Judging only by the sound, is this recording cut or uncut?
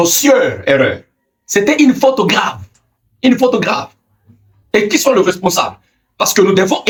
uncut